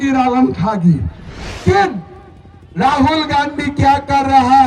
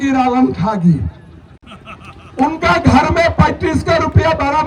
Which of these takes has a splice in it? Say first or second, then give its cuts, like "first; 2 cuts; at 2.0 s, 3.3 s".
first; 1 cut; at 1.6 s